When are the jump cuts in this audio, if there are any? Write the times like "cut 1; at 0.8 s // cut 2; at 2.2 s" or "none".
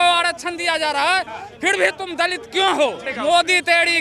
cut 1; at 3.1 s

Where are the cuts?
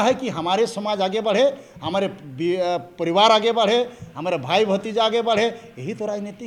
none

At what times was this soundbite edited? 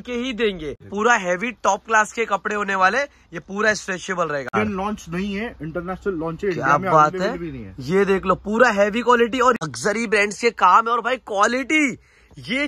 cut 1; at 0.9 s // cut 2; at 4.5 s // cut 3; at 9.7 s

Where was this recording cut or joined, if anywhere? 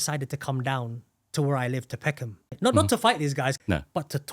cut 1; at 2.5 s // cut 2; at 3.6 s

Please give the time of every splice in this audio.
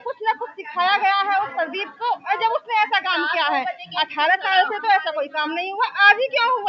none

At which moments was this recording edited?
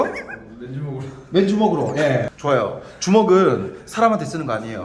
none

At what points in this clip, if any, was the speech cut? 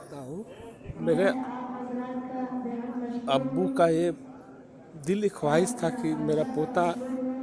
none

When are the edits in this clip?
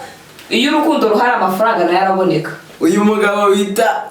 cut 1; at 2.6 s

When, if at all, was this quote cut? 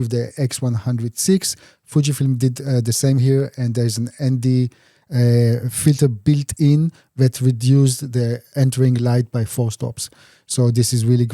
cut 1; at 8.5 s

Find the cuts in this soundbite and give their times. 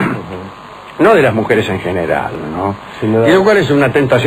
cut 1; at 2.4 s

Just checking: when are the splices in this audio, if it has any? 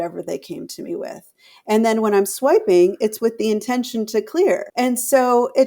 cut 1; at 4.7 s

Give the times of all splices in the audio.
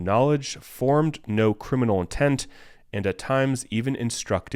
none

